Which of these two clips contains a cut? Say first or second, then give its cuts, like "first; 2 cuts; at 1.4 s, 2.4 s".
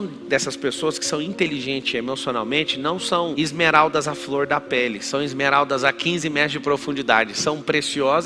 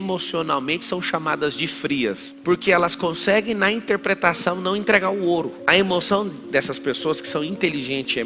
second; 1 cut; at 2.3 s